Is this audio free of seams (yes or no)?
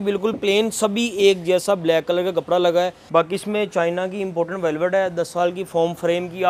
no